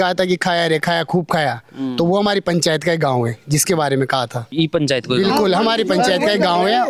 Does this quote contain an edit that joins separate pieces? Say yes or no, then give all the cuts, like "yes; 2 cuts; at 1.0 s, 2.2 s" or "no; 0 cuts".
no; 0 cuts